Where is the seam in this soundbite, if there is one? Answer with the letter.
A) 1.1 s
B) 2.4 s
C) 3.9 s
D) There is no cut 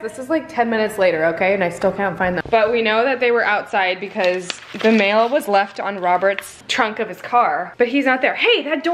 B